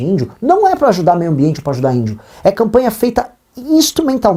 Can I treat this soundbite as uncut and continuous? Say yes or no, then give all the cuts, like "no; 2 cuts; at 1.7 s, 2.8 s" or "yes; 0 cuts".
yes; 0 cuts